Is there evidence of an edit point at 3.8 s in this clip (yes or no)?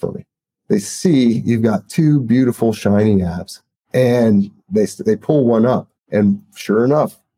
no